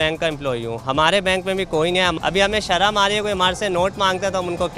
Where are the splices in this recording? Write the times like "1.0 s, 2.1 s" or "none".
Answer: 2.1 s